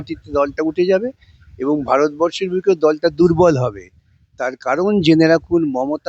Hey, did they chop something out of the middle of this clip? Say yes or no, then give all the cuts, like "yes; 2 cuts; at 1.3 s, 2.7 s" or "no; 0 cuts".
no; 0 cuts